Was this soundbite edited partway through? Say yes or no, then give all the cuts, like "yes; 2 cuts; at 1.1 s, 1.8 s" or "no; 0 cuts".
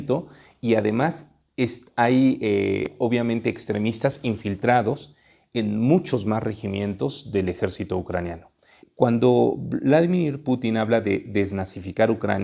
yes; 1 cut; at 8.8 s